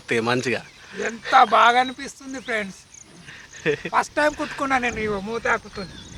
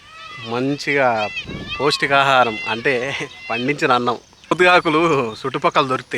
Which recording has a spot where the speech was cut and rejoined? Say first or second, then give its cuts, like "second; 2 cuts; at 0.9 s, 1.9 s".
second; 1 cut; at 4.5 s